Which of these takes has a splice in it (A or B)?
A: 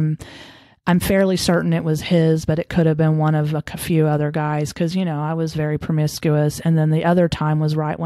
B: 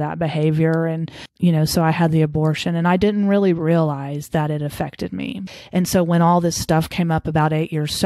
B